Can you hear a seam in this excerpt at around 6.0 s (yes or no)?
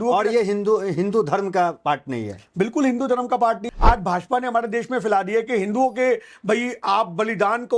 no